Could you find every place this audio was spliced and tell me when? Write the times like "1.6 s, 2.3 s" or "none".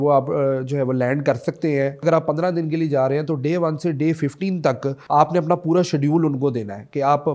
2.0 s, 4.9 s